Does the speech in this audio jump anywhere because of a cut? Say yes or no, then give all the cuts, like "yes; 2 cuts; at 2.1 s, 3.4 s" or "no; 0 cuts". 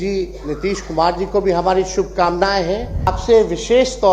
yes; 1 cut; at 3.1 s